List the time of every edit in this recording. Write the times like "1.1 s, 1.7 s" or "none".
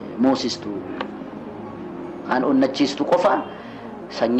none